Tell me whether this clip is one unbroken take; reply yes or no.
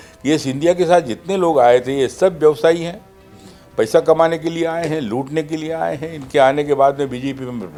yes